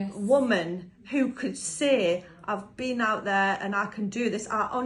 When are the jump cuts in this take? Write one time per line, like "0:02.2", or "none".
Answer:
none